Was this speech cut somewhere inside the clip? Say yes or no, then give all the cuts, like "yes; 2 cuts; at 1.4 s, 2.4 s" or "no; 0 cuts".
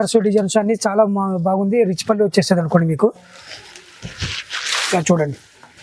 no; 0 cuts